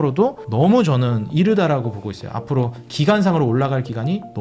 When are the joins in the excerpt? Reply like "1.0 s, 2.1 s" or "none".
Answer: none